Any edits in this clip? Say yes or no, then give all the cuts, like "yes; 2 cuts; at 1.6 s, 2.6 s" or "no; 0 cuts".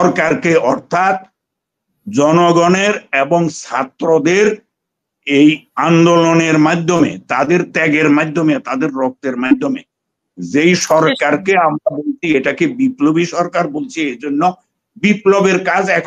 no; 0 cuts